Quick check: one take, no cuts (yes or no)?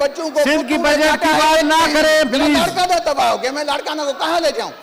yes